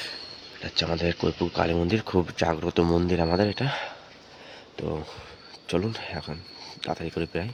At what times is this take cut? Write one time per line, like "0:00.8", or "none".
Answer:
none